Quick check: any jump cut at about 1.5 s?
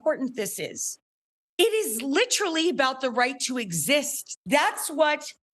no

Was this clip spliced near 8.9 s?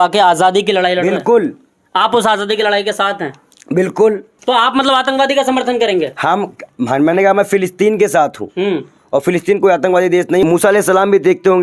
no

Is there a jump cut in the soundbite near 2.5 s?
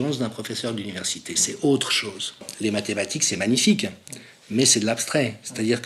yes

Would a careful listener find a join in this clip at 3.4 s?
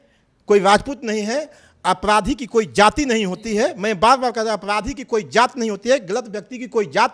no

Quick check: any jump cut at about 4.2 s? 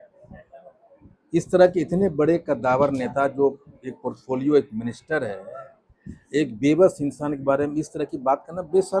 no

